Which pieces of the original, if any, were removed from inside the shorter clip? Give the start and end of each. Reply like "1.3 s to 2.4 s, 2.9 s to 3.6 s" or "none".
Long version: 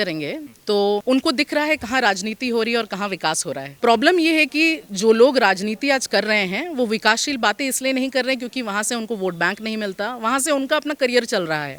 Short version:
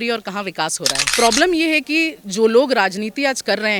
none